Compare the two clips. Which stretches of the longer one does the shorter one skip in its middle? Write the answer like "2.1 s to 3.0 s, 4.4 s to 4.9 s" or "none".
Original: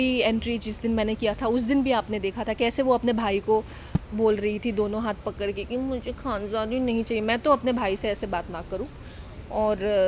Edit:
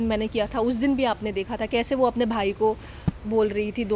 none